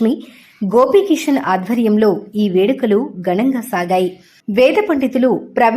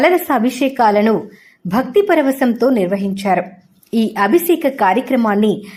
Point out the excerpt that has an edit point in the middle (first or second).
first